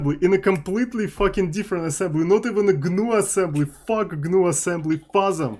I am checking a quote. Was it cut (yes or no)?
no